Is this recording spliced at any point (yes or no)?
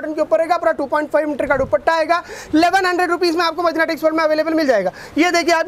no